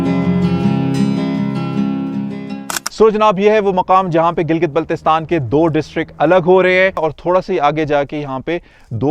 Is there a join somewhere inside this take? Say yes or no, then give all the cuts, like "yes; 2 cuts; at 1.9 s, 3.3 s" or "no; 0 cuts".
yes; 2 cuts; at 2.6 s, 7.0 s